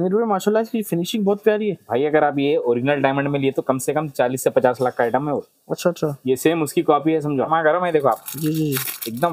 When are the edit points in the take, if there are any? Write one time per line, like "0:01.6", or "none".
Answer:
0:07.5